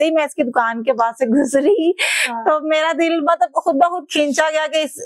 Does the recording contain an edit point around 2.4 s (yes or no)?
no